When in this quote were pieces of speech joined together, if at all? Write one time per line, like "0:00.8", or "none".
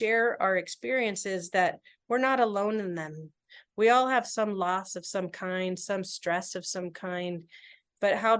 none